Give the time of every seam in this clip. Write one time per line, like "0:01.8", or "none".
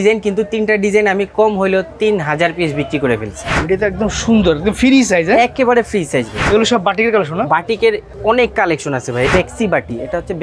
0:03.6
0:06.4
0:08.1
0:09.3